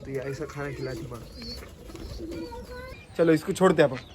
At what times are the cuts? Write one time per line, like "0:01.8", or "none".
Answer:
0:03.0